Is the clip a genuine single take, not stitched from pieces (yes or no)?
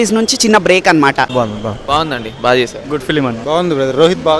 no